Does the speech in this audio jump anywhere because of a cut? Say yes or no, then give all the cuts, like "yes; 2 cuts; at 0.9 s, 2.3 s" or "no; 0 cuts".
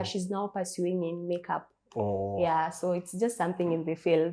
no; 0 cuts